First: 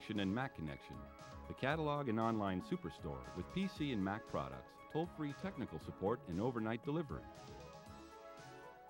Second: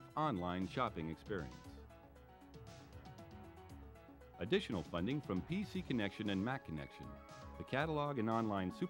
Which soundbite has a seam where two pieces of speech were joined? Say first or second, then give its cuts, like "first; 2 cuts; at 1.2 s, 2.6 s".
second; 2 cuts; at 1.5 s, 4.1 s